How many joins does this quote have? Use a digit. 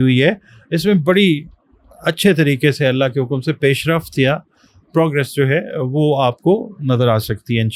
0